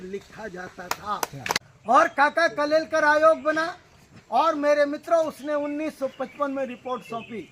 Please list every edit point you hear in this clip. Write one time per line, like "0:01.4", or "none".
0:01.6